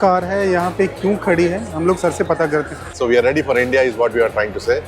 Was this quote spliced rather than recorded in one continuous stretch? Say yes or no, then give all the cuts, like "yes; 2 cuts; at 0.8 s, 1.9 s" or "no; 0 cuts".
yes; 1 cut; at 2.9 s